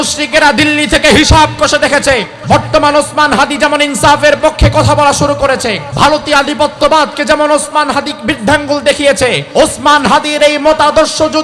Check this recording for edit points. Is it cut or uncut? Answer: cut